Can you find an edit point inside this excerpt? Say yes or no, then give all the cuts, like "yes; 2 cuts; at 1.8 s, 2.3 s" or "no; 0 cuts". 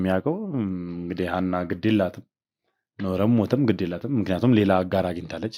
no; 0 cuts